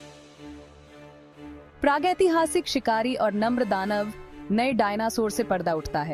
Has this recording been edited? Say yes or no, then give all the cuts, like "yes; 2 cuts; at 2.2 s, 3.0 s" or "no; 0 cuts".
no; 0 cuts